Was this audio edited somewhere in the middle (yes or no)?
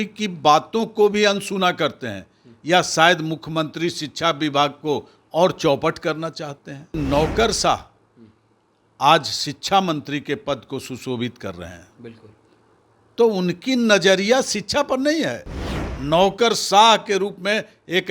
yes